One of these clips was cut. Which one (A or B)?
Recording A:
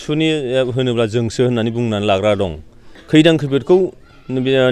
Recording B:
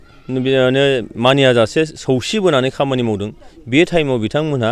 A